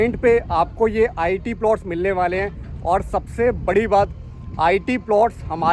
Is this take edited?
no; 0 cuts

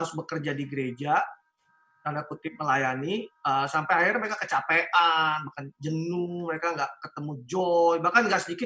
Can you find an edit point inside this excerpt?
no; 0 cuts

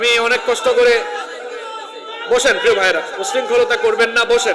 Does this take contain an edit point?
no; 0 cuts

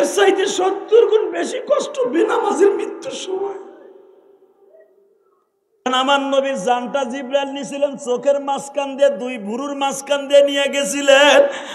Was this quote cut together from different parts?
yes; 1 cut; at 5.9 s

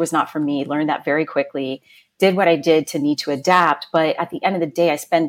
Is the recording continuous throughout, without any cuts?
yes; 0 cuts

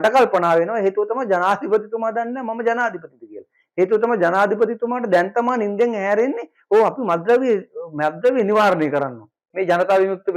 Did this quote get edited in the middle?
yes; 1 cut; at 9.4 s

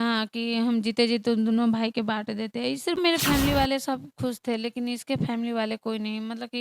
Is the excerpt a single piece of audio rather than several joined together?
no; 1 cut; at 3.0 s

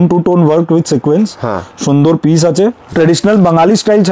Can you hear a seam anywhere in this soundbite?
yes; 1 cut; at 2.9 s

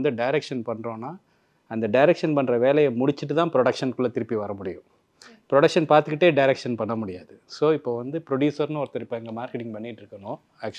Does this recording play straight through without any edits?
yes; 0 cuts

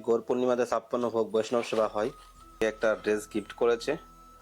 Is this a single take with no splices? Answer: no; 1 cut; at 2.6 s

